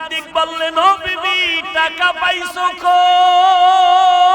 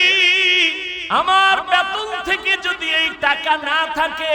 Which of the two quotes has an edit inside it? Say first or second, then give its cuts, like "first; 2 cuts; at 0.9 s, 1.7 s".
second; 1 cut; at 0.9 s